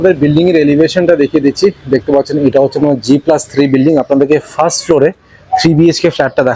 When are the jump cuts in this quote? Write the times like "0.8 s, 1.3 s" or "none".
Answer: none